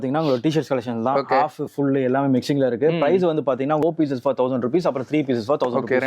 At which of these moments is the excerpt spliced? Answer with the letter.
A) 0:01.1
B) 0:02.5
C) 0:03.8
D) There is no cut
C